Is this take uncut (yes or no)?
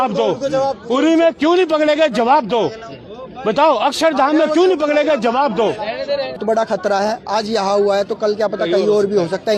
no